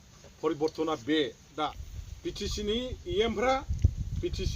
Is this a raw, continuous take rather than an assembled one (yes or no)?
no